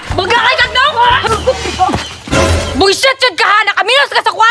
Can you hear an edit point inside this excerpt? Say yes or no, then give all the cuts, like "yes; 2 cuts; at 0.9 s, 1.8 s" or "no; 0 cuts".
yes; 1 cut; at 1.2 s